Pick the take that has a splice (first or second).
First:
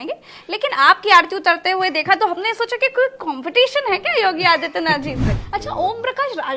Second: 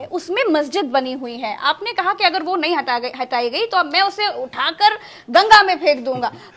first